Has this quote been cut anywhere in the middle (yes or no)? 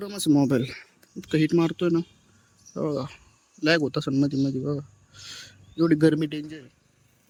no